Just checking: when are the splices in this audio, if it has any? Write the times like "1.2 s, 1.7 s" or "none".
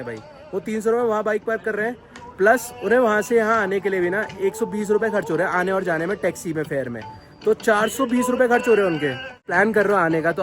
9.5 s